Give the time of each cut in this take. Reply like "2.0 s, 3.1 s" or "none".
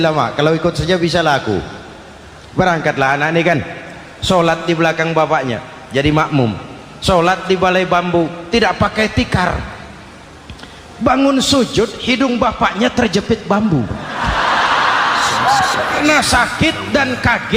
16.0 s